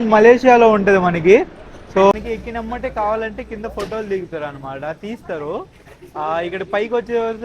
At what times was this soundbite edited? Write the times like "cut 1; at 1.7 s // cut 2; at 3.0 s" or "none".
cut 1; at 2.1 s